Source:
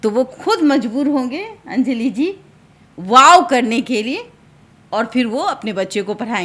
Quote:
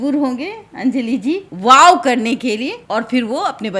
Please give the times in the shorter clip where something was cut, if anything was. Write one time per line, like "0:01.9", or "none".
0:01.5
0:02.8